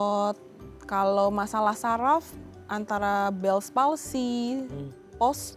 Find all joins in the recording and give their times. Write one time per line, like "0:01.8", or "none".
none